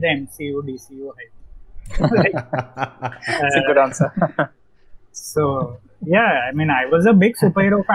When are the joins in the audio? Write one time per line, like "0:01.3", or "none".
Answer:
none